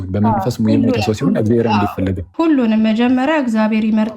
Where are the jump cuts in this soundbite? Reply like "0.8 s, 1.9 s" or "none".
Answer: 2.2 s